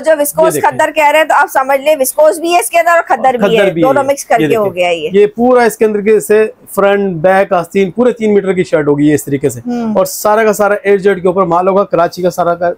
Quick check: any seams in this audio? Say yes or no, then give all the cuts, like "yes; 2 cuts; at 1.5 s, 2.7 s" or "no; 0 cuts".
no; 0 cuts